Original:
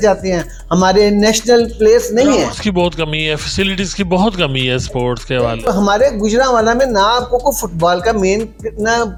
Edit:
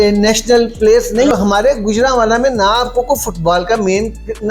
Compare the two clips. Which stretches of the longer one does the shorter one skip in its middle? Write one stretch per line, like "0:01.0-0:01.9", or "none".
0:02.3-0:05.7